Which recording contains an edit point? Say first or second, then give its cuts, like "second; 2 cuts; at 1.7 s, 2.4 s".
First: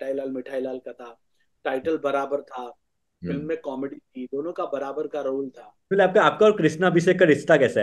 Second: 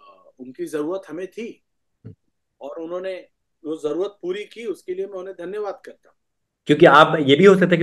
first; 1 cut; at 5.9 s